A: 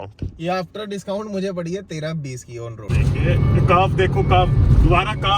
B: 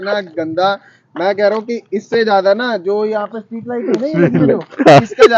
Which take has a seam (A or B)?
A